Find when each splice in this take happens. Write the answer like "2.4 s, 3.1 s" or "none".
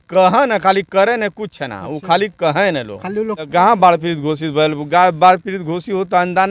3.5 s